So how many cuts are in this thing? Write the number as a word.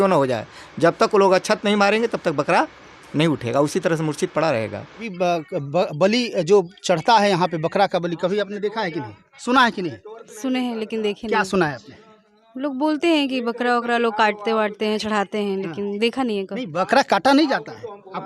one